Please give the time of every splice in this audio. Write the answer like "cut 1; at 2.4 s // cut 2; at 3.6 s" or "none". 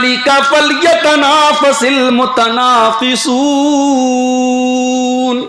none